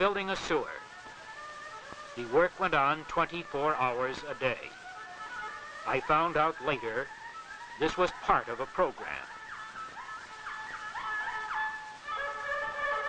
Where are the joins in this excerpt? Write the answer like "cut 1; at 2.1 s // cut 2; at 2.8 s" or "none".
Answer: none